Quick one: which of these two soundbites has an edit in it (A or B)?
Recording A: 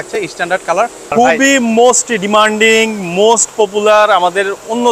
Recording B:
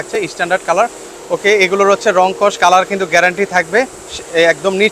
A